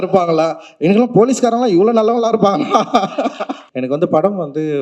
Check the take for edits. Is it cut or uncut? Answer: cut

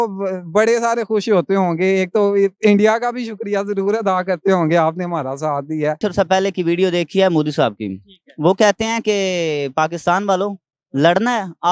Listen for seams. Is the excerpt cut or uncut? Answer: cut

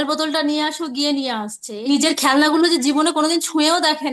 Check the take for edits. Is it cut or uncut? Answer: cut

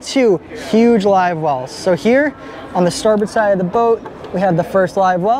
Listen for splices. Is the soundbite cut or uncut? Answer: uncut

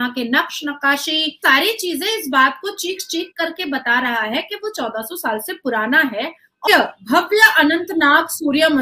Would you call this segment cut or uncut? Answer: cut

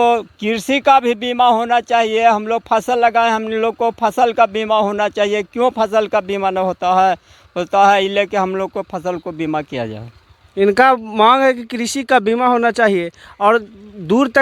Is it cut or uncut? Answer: uncut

